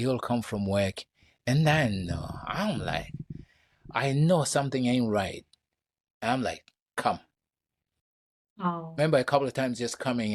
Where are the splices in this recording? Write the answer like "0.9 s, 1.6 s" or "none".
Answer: none